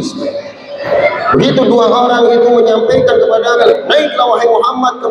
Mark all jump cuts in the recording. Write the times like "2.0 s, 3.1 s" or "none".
0.8 s, 3.7 s